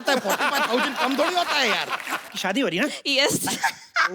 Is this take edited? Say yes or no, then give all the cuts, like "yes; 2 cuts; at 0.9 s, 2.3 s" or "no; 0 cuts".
yes; 1 cut; at 2.3 s